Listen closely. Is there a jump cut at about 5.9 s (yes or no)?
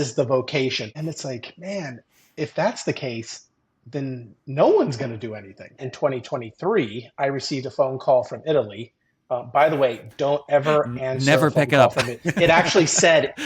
yes